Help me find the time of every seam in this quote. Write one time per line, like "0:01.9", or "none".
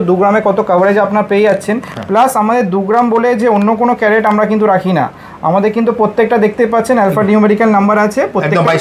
none